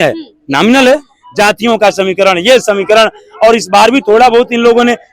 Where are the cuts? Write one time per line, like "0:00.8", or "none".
0:01.2